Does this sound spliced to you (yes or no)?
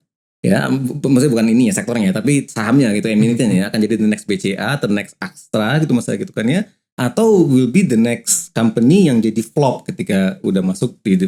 no